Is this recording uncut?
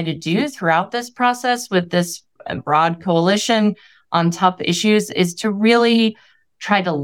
no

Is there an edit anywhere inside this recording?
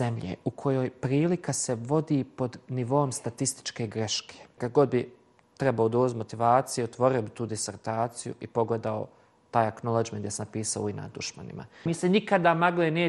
yes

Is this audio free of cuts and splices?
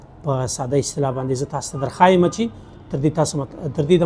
yes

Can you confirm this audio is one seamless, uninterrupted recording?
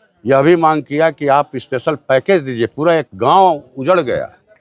yes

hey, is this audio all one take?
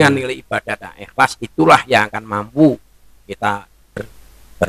no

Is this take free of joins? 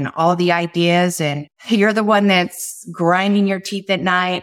no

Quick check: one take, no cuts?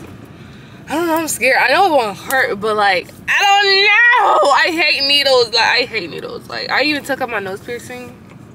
yes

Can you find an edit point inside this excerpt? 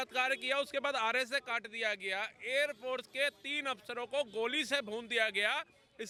no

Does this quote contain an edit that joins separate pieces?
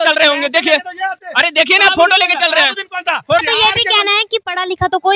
yes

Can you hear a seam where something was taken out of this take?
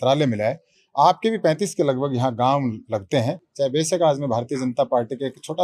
yes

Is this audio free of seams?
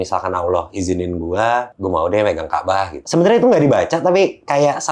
no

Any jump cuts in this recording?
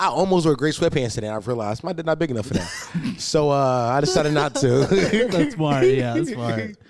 no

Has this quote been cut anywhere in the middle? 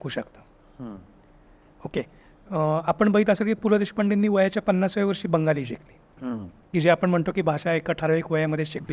yes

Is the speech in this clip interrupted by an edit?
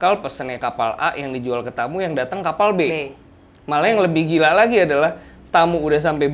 no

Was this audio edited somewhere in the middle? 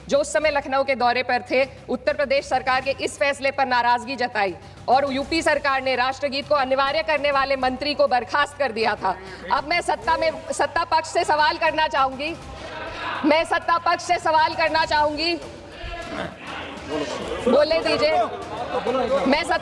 no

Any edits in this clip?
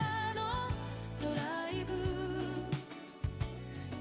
no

